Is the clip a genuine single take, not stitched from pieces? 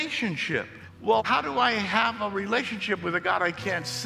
no; 1 cut; at 1.2 s

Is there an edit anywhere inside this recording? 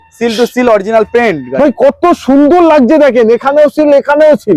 no; 0 cuts

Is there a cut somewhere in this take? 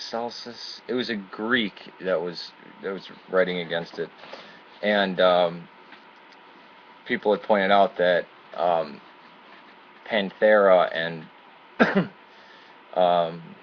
yes; 1 cut; at 3.1 s

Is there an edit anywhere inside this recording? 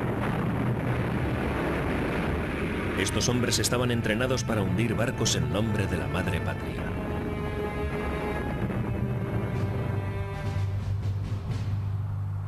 yes; 1 cut; at 10.8 s

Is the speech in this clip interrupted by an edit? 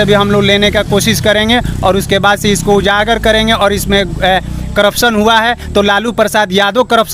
no; 0 cuts

